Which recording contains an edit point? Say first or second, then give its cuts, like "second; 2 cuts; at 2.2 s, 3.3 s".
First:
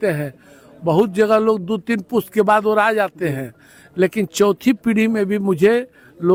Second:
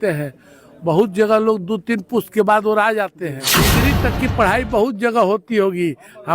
second; 1 cut; at 3.7 s